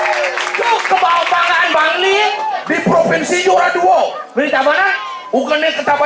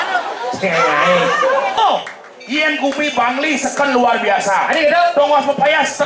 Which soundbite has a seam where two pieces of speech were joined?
second; 1 cut; at 1.8 s

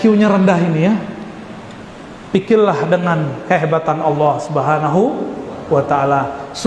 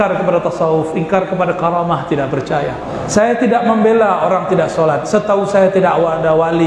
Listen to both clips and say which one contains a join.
second; 1 cut; at 2.9 s

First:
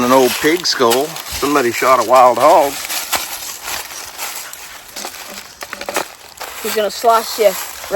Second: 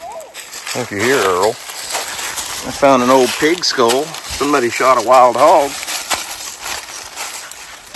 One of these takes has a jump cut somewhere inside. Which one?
first; 1 cut; at 6.2 s

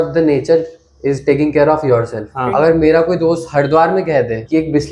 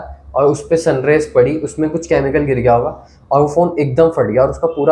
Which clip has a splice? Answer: first; 1 cut; at 2.2 s

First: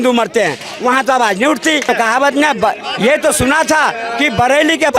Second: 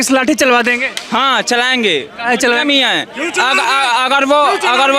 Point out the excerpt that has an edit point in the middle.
first; 1 cut; at 1.8 s

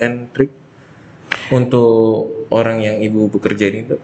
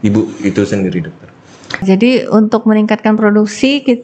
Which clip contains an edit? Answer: second; 1 cut; at 1.8 s

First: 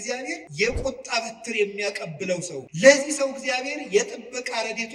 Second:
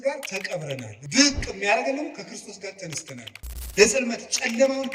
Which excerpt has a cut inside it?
second; 2 cuts; at 0.9 s, 3.3 s

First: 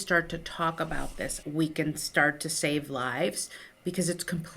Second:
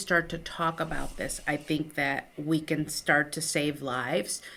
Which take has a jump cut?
first; 1 cut; at 1.4 s

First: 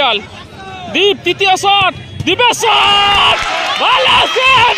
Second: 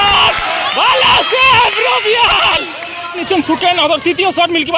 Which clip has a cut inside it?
second; 1 cut; at 3.2 s

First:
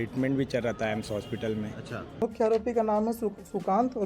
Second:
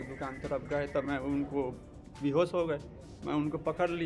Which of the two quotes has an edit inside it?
first; 1 cut; at 2.2 s

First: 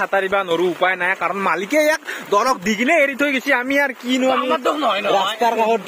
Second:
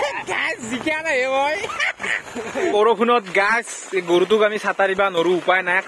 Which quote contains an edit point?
second; 1 cut; at 2.7 s

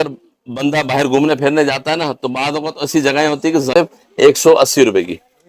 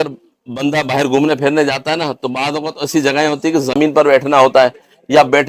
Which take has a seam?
first; 1 cut; at 3.7 s

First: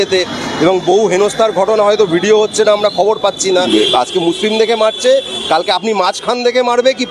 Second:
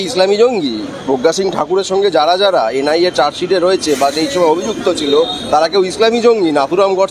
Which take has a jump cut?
first; 1 cut; at 3.7 s

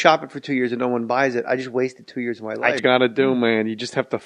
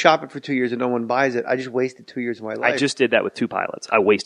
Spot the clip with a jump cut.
second; 1 cut; at 2.8 s

